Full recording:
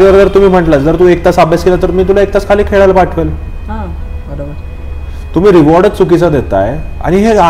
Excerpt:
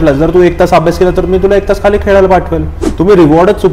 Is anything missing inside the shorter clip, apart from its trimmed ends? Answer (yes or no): yes